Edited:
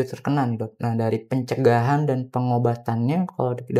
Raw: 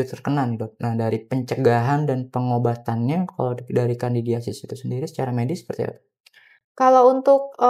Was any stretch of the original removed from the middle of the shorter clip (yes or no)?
no